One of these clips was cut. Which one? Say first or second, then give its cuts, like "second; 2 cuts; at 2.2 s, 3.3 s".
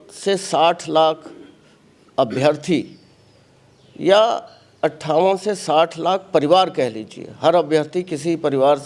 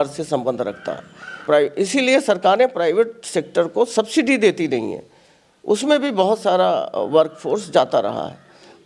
second; 1 cut; at 1.4 s